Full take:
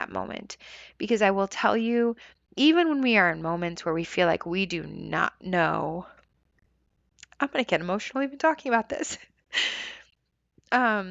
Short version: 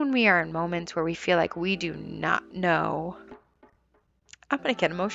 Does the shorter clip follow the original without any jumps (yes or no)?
yes